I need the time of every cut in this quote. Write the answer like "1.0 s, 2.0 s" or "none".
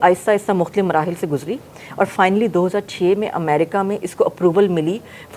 none